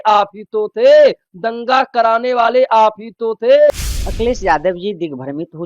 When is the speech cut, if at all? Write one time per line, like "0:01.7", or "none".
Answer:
0:03.7